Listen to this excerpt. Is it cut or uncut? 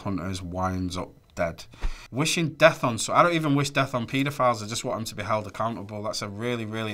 uncut